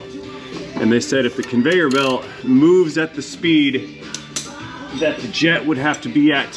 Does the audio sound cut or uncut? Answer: uncut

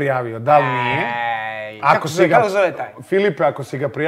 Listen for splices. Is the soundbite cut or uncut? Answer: uncut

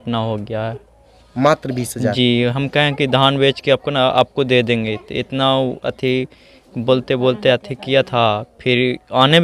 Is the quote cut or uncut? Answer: uncut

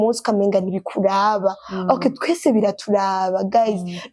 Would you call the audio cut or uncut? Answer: uncut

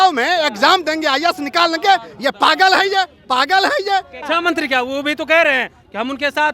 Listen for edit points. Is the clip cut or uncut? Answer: cut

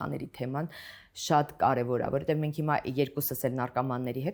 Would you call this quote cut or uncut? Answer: uncut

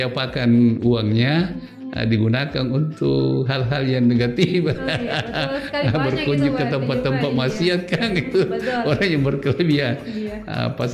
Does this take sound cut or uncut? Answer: uncut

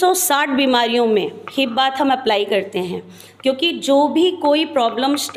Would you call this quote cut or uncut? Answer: uncut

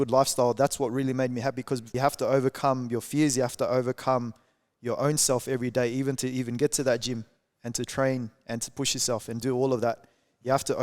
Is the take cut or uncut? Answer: cut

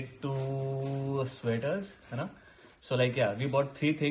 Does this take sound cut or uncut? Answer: uncut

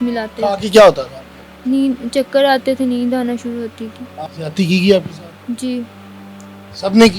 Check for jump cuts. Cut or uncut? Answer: cut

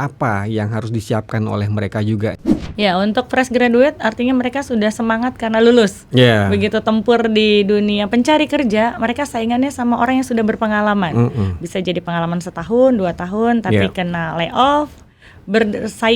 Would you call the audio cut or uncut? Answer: cut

